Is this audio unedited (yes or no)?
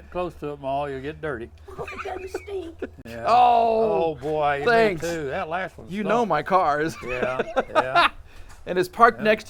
yes